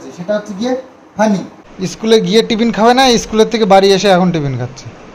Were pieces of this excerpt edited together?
yes; 1 cut; at 2.0 s

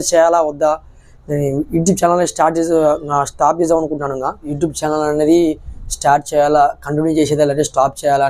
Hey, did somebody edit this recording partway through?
yes; 1 cut; at 4.5 s

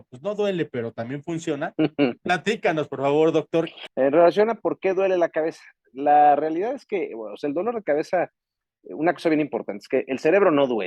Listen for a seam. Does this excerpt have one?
yes; 1 cut; at 3.8 s

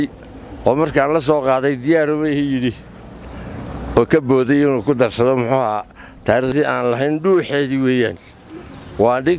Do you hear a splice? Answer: yes; 1 cut; at 6.5 s

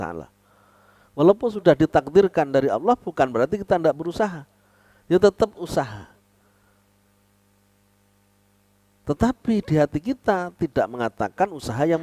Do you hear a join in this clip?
no; 0 cuts

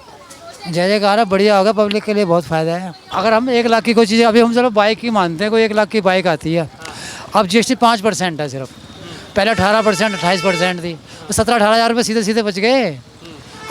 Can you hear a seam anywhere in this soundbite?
yes; 1 cut; at 3.0 s

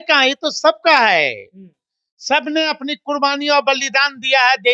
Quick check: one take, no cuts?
yes; 0 cuts

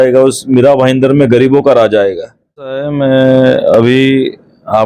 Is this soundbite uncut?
no; 1 cut; at 2.9 s

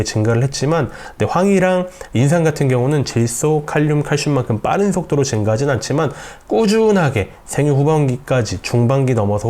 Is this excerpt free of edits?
no; 1 cut; at 1.0 s

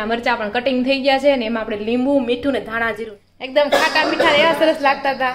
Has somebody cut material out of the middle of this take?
yes; 1 cut; at 3.1 s

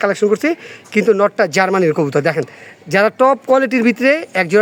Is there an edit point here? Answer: no; 0 cuts

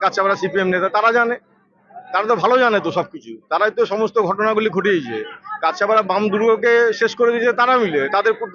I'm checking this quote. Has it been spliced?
no; 0 cuts

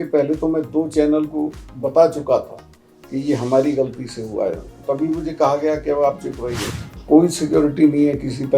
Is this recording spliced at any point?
yes; 1 cut; at 6.6 s

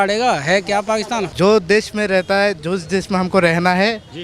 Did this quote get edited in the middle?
yes; 1 cut; at 1.3 s

